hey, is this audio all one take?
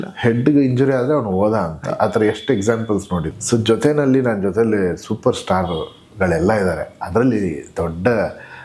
no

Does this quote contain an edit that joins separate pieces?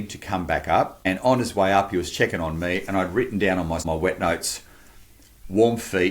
yes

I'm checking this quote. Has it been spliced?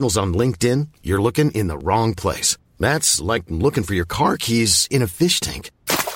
no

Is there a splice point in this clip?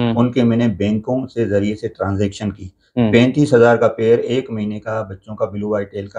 no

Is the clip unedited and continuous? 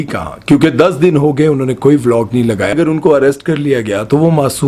no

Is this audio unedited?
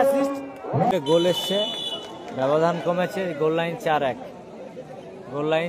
no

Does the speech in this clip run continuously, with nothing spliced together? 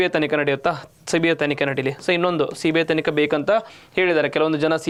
yes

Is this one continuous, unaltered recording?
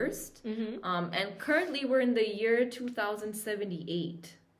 yes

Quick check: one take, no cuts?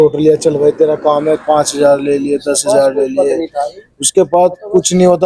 yes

